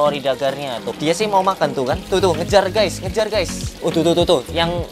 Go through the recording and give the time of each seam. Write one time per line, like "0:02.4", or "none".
0:00.9
0:03.7